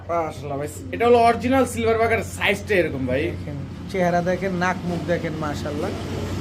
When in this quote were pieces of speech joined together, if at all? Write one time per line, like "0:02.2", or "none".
none